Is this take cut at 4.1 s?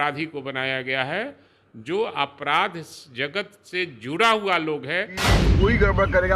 no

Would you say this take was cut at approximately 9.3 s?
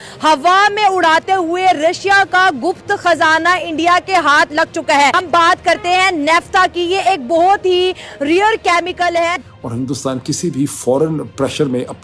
yes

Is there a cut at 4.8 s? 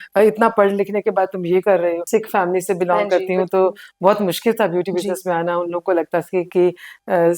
no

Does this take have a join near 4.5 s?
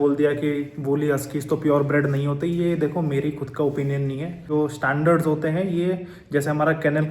yes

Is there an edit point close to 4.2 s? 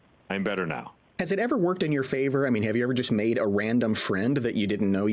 no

